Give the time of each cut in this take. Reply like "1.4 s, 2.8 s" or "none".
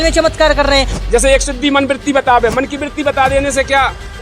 1.0 s